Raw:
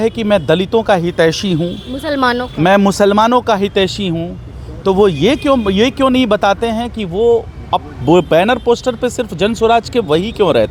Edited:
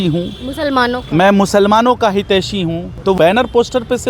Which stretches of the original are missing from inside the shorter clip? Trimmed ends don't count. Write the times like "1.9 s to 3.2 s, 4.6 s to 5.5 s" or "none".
4.6 s to 8.3 s